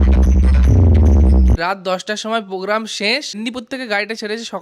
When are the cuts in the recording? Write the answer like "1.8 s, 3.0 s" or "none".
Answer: 1.6 s, 3.4 s